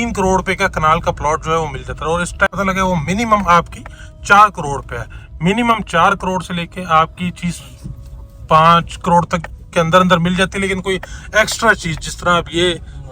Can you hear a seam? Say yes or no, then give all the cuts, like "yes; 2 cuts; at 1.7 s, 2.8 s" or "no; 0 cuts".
yes; 1 cut; at 2.5 s